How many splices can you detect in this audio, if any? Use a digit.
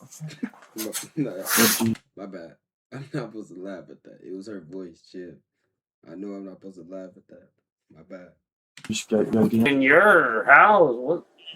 1